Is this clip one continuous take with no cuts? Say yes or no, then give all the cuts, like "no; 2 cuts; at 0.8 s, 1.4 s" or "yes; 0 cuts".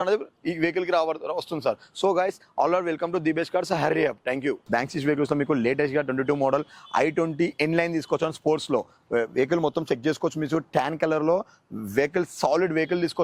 yes; 0 cuts